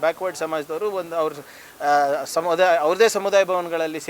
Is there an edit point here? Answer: no; 0 cuts

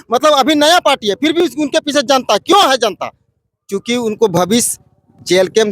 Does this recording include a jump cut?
no; 0 cuts

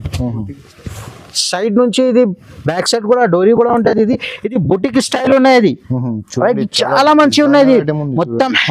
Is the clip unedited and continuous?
yes; 0 cuts

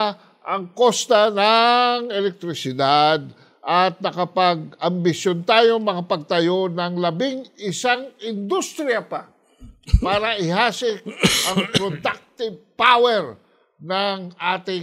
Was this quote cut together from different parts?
no; 0 cuts

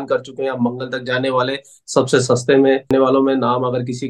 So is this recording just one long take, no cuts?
no; 1 cut; at 2.9 s

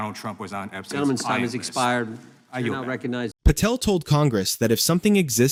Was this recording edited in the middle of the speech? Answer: no; 0 cuts

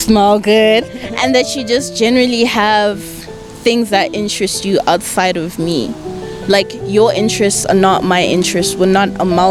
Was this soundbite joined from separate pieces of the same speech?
no; 0 cuts

